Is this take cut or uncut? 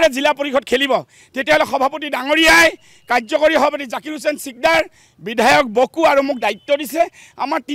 uncut